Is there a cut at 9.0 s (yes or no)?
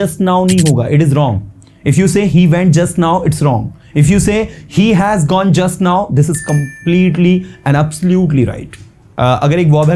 yes